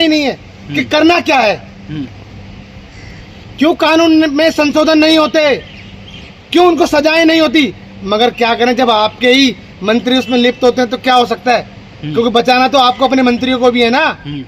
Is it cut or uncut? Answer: uncut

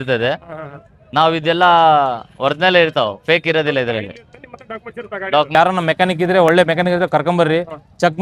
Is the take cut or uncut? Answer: cut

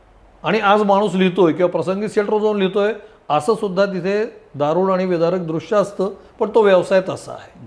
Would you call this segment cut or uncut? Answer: uncut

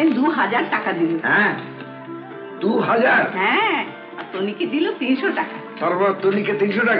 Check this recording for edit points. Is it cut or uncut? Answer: uncut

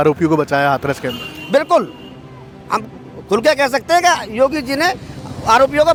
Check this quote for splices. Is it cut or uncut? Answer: uncut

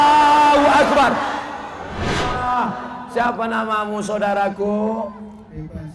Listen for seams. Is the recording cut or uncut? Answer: cut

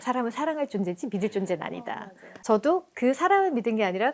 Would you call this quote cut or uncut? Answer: cut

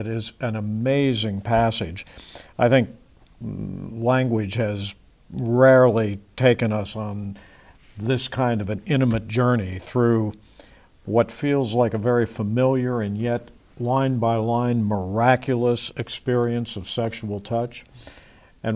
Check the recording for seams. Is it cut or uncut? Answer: cut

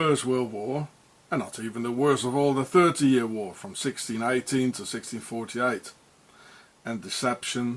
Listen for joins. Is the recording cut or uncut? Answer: cut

